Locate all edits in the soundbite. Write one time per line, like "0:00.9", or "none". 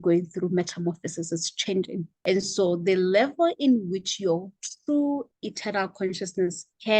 0:02.1